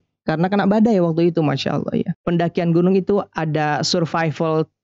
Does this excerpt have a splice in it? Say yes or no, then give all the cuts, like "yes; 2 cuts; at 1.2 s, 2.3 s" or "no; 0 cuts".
yes; 1 cut; at 2.2 s